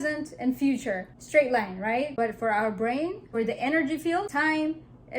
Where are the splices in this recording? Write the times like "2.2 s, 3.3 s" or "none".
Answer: 1.1 s, 2.1 s, 3.2 s, 4.3 s